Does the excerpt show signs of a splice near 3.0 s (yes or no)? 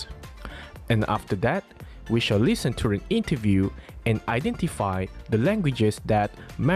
yes